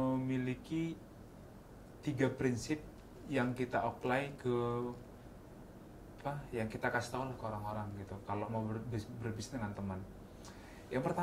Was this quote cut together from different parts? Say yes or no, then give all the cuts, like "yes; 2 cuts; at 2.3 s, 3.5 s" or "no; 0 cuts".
no; 0 cuts